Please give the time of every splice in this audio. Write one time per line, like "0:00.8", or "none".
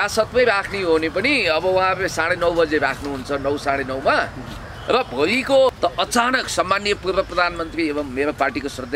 0:05.7